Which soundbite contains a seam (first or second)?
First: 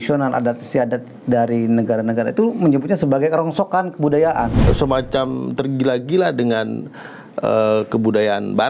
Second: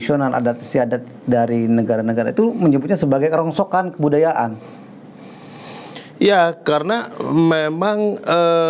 first